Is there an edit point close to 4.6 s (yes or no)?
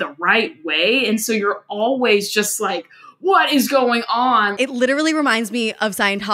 yes